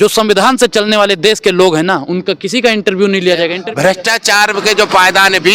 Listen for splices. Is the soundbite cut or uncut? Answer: cut